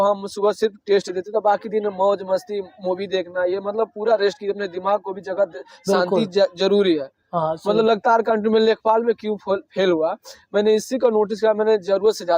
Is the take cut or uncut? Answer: uncut